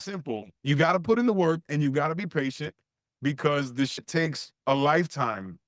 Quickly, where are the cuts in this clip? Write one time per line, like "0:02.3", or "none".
0:04.0